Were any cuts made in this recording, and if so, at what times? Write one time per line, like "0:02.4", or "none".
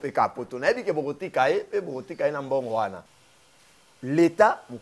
0:03.1